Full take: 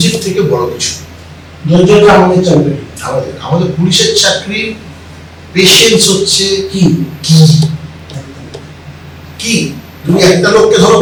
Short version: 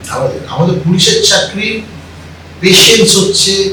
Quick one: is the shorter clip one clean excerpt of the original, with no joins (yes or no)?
yes